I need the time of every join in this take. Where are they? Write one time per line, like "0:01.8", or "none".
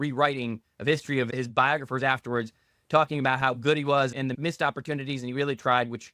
0:01.3
0:04.3